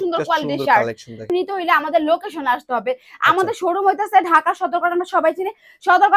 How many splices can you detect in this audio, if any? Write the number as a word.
one